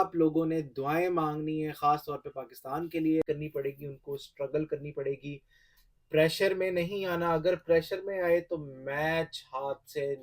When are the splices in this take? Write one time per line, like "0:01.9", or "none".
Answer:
0:03.3

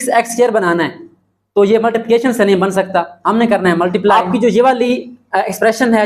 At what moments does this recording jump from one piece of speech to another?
0:04.1

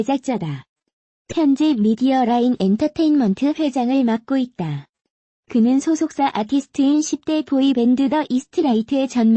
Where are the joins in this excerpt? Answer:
0:08.3

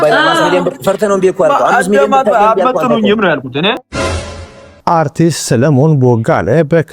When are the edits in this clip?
0:04.3

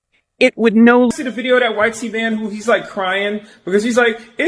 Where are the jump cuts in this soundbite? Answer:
0:01.1

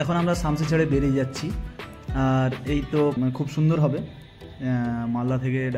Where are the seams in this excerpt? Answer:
0:03.1

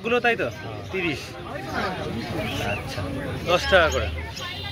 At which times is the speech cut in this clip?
none

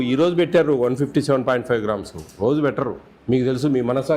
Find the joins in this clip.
0:03.1

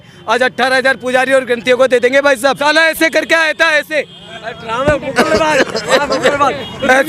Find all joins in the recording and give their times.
0:02.6

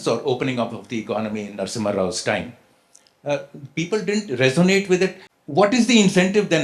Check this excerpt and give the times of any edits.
0:05.3

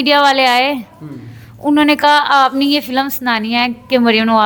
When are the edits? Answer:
none

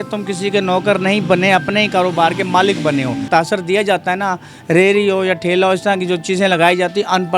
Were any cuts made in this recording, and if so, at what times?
0:03.3

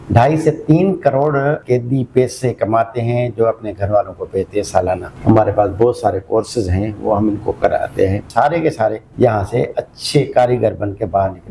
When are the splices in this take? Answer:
0:01.6
0:05.1
0:08.2
0:09.0

